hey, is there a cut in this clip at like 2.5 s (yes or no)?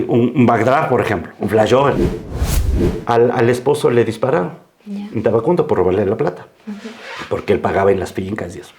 yes